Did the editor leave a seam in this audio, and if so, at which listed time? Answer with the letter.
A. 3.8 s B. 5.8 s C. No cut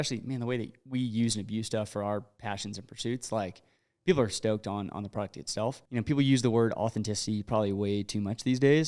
B